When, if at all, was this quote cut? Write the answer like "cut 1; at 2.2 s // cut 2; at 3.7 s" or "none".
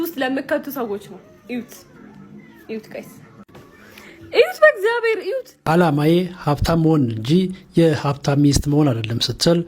cut 1; at 5.4 s